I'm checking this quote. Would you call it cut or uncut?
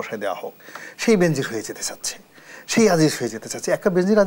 uncut